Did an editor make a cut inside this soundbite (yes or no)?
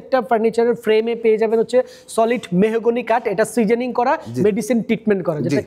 no